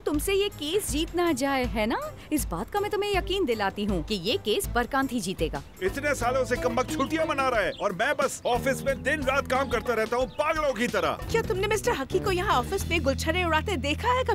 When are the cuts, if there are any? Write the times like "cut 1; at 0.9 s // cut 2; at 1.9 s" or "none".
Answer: cut 1; at 5.6 s // cut 2; at 11.2 s